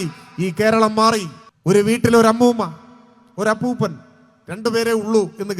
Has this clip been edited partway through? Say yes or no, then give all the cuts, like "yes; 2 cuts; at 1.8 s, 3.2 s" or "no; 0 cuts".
yes; 1 cut; at 1.4 s